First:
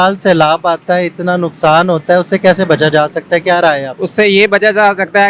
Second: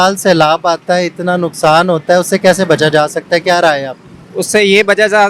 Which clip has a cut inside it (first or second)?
first